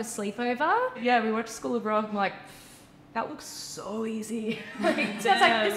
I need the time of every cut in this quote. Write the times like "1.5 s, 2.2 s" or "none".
1.0 s